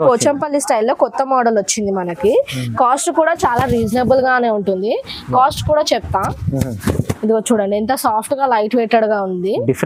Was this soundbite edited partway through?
no; 0 cuts

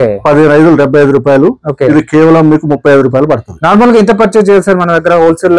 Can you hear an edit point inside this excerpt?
no; 0 cuts

